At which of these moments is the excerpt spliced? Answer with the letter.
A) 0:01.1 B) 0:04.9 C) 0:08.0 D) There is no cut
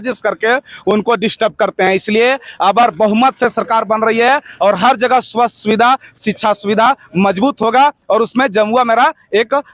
D